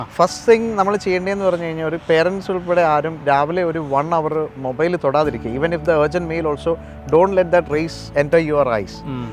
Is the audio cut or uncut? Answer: uncut